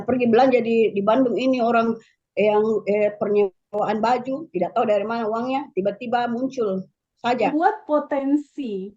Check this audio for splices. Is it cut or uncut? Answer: cut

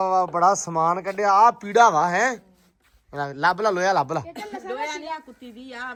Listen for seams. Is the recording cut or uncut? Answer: uncut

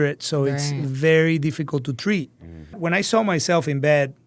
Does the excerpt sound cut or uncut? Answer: cut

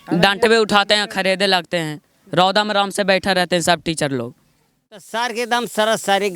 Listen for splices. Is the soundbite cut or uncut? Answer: cut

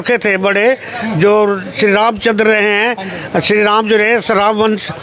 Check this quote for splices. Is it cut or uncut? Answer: uncut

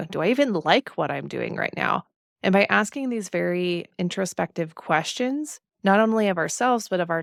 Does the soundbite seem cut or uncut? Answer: uncut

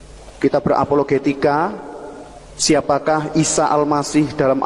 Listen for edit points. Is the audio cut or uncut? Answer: uncut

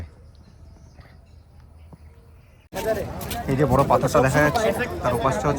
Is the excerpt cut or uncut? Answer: cut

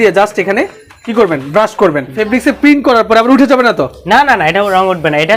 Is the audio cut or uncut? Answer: cut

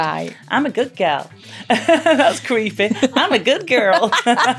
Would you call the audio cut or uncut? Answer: uncut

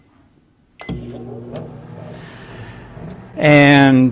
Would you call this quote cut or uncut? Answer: uncut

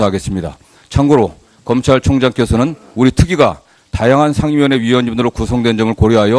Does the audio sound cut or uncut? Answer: uncut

